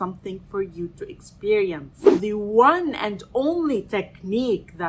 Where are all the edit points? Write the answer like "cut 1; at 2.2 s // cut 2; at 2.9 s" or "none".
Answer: cut 1; at 2.2 s